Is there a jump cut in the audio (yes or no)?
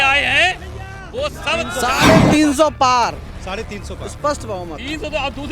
yes